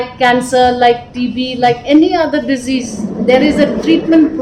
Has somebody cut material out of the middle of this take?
no; 0 cuts

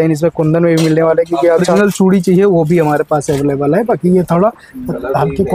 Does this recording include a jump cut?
yes; 1 cut; at 1.7 s

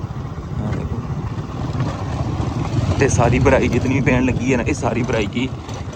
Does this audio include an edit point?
no; 0 cuts

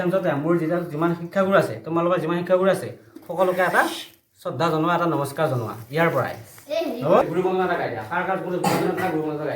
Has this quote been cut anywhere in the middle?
yes; 1 cut; at 7.2 s

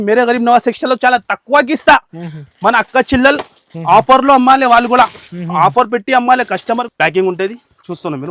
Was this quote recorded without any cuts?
no; 1 cut; at 6.9 s

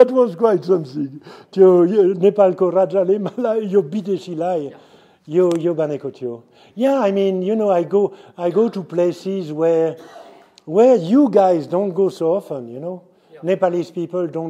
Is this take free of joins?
yes; 0 cuts

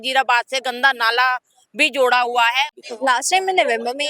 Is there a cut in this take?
yes; 1 cut; at 2.8 s

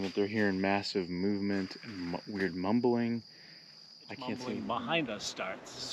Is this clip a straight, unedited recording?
no; 1 cut; at 4.4 s

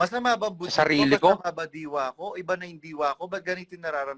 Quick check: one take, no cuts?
yes; 0 cuts

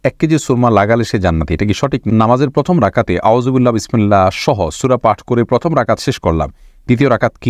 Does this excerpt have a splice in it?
yes; 1 cut; at 2.0 s

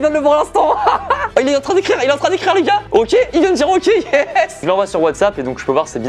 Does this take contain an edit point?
yes; 2 cuts; at 1.3 s, 4.6 s

